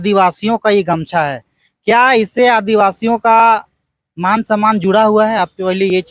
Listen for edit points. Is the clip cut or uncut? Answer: uncut